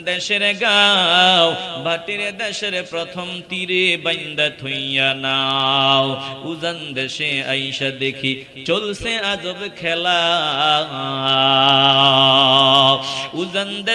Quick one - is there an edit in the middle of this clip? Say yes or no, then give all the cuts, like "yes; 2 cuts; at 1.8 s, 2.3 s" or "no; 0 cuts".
no; 0 cuts